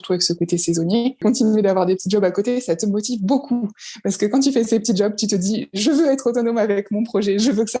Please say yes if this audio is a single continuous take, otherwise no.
no